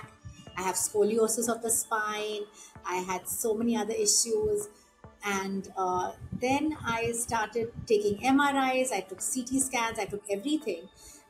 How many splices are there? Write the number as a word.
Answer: zero